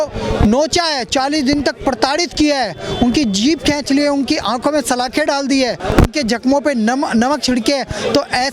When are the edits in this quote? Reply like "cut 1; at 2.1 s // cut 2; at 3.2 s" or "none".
cut 1; at 5.7 s